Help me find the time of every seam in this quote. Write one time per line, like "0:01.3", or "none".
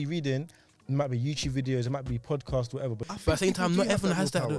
0:03.1